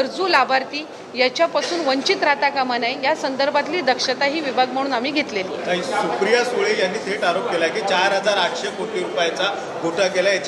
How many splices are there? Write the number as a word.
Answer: zero